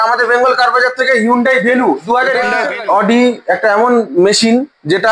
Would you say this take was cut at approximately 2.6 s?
yes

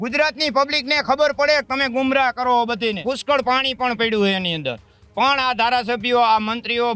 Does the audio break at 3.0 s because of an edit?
yes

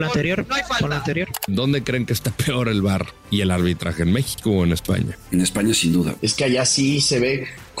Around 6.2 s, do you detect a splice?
yes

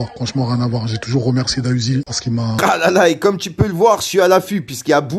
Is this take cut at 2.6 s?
yes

